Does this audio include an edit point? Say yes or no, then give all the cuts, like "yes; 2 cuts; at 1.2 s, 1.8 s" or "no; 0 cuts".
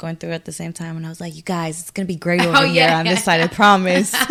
no; 0 cuts